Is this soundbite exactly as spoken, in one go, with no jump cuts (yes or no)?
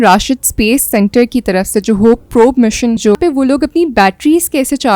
no